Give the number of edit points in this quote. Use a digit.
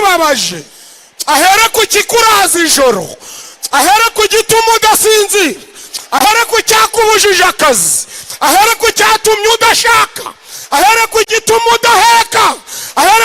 0